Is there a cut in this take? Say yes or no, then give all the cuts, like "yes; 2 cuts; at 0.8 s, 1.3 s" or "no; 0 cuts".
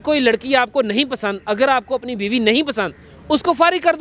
no; 0 cuts